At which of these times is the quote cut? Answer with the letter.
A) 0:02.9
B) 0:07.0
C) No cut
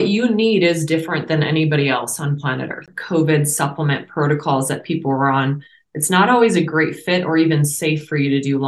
A